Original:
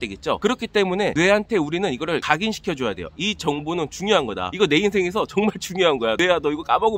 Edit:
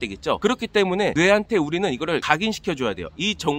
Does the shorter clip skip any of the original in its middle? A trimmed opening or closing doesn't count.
no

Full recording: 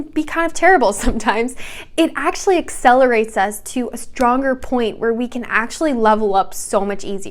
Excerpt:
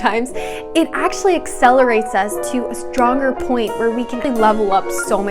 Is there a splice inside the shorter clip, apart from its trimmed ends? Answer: yes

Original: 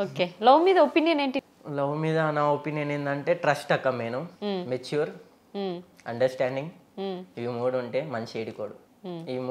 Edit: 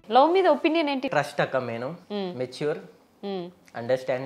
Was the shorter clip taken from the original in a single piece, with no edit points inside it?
no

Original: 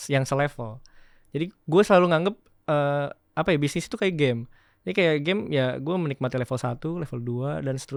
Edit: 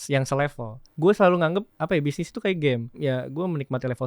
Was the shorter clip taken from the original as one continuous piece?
no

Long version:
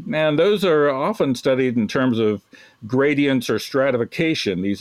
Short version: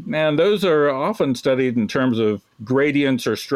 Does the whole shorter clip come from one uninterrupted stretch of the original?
no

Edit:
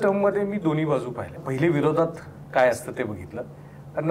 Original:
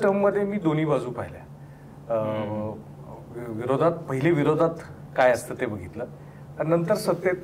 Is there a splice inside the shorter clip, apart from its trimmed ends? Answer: yes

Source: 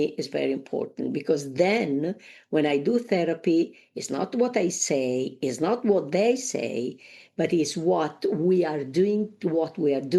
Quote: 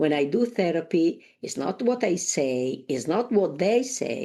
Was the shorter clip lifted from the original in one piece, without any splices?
yes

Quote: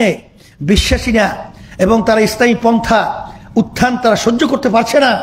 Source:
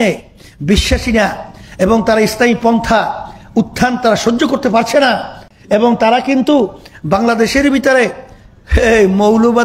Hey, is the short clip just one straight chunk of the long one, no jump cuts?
yes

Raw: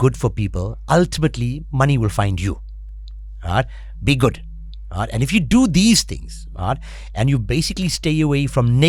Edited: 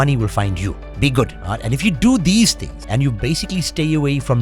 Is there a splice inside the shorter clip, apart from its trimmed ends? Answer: yes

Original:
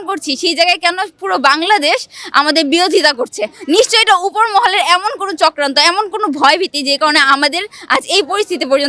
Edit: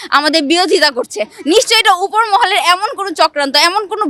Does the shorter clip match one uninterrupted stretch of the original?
yes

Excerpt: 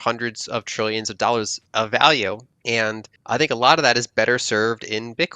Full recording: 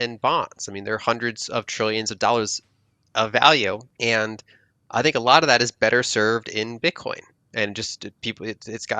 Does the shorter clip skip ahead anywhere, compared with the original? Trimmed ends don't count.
yes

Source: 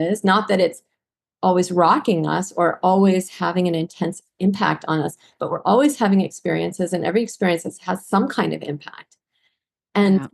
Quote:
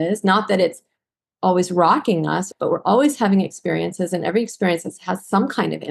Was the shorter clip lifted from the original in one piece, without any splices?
no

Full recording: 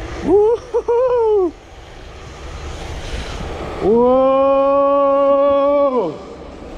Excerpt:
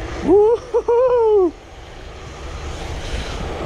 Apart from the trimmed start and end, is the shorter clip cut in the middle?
no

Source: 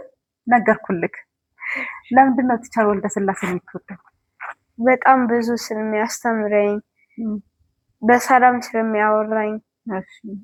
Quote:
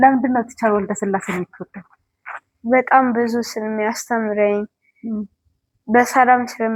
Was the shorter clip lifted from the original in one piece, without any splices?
yes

